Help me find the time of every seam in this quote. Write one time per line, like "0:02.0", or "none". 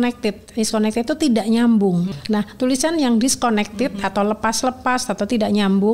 0:02.1